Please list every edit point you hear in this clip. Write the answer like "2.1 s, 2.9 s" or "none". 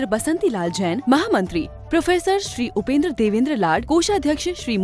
none